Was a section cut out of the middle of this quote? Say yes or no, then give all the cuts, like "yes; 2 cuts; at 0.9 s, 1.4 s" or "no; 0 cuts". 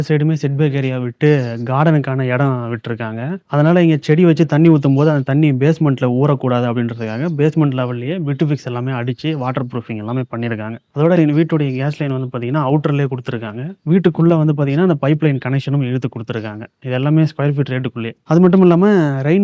no; 0 cuts